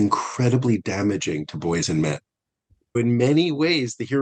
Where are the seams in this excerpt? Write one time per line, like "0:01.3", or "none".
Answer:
0:03.0

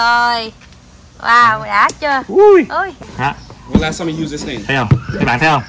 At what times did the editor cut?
0:03.0

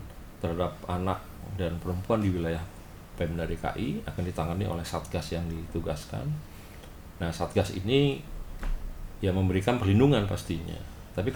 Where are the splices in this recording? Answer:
none

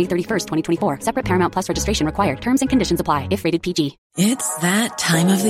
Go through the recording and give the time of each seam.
0:04.0

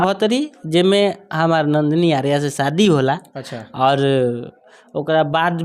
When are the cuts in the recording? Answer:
none

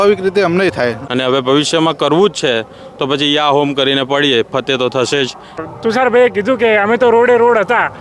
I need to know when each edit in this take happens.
0:01.0
0:05.6

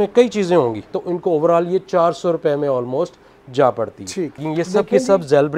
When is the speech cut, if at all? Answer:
0:01.0
0:04.4

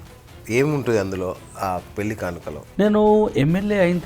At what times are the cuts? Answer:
0:02.6

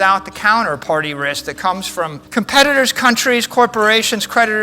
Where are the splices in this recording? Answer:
0:02.2

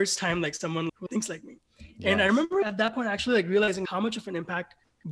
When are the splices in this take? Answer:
0:01.0
0:02.6
0:03.9

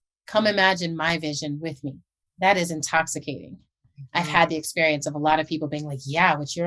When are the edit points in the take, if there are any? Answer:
0:02.2
0:03.9

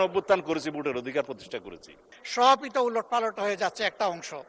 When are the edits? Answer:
0:02.0

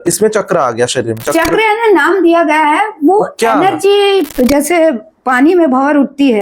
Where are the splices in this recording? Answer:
0:04.3

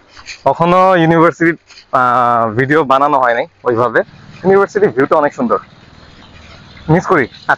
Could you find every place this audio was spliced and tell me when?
0:04.2

